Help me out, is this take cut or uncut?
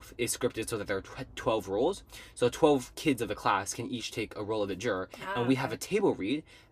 uncut